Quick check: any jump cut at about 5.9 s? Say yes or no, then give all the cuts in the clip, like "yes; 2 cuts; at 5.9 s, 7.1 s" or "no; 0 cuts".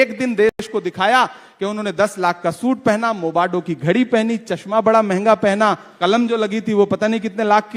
yes; 1 cut; at 5.9 s